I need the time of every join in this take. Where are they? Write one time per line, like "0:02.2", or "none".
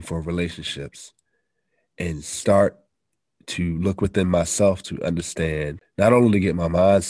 0:05.8